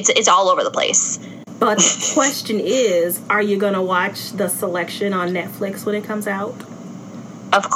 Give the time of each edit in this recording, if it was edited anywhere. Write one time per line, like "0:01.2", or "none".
0:01.4